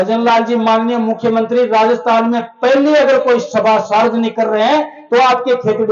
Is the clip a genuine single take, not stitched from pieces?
yes; 0 cuts

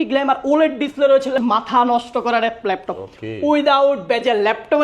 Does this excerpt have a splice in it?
yes; 1 cut; at 1.4 s

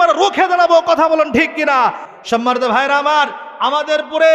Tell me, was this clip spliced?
yes; 1 cut; at 2.1 s

